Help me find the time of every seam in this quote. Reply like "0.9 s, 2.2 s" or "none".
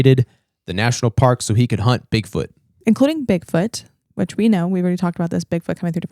2.7 s